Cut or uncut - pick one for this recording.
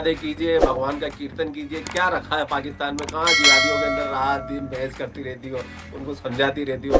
uncut